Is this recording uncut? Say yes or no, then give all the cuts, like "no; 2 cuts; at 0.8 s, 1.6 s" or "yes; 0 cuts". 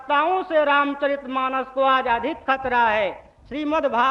yes; 0 cuts